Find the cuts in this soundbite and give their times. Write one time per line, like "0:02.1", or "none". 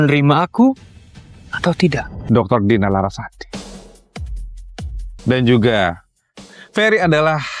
0:02.1
0:05.2